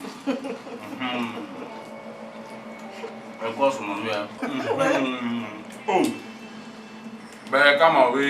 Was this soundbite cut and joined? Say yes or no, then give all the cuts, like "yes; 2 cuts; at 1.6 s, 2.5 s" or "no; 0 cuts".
yes; 1 cut; at 4.3 s